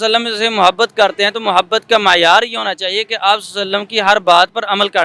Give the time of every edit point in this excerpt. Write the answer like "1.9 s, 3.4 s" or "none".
none